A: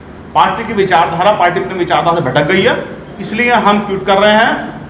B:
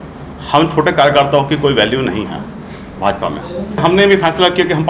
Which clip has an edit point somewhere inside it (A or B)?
B